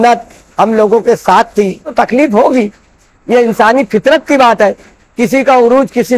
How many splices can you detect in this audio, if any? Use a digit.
1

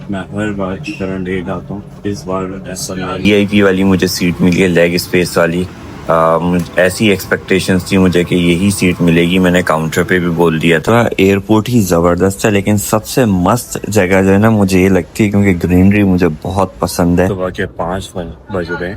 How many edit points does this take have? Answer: 3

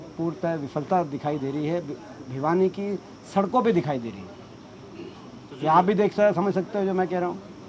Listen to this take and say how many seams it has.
0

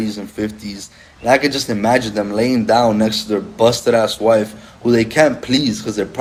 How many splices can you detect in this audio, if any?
0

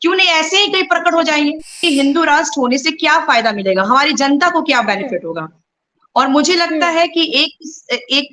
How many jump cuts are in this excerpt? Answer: 1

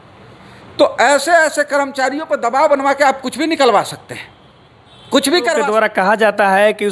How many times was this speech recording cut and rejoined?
1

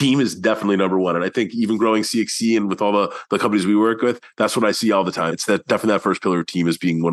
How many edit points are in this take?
1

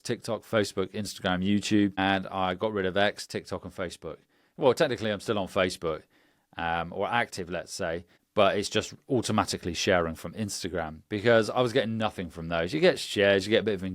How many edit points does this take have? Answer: 2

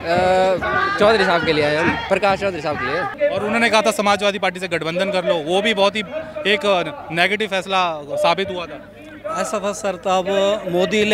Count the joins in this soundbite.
1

